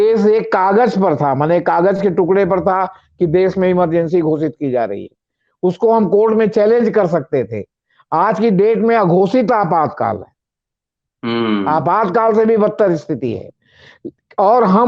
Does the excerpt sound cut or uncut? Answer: uncut